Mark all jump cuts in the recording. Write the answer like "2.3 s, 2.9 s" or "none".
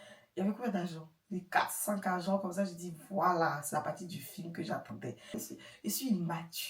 5.3 s